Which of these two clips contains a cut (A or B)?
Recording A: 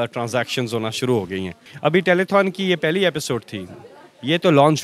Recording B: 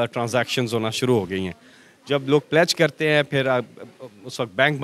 A